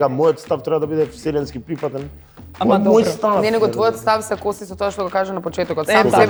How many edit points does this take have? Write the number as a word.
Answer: zero